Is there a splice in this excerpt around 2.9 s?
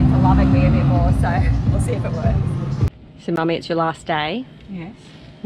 yes; 1 cut; at 2.9 s

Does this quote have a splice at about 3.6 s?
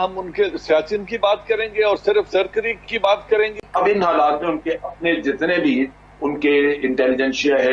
yes; 1 cut; at 3.6 s

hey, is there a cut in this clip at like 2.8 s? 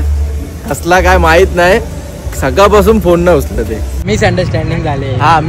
no; 1 cut; at 4.0 s

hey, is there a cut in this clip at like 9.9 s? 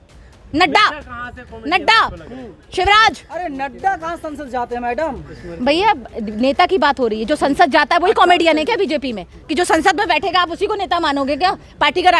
no; 0 cuts

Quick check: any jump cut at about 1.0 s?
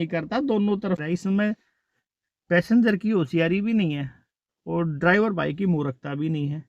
yes; 1 cut; at 1.0 s

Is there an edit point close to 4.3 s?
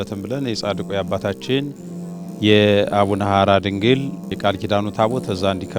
yes; 1 cut; at 4.3 s

